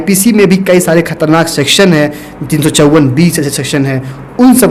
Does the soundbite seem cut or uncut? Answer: uncut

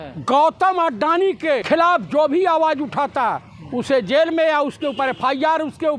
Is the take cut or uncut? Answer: cut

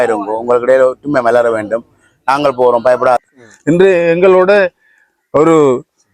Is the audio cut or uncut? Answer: cut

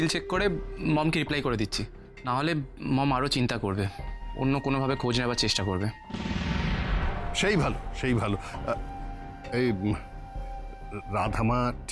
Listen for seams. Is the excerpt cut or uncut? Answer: uncut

